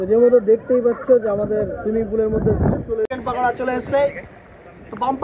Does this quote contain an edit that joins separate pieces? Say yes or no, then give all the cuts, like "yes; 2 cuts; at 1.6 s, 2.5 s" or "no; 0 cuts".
yes; 1 cut; at 3.1 s